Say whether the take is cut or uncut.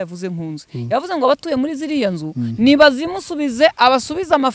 uncut